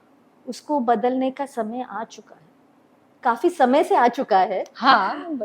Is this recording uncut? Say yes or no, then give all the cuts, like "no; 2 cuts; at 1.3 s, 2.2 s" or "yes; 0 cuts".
yes; 0 cuts